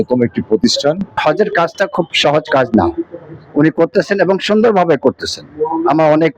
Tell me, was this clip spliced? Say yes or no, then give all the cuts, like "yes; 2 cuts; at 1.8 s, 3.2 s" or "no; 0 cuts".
yes; 1 cut; at 1.1 s